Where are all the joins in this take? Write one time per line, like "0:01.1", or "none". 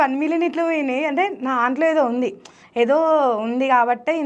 none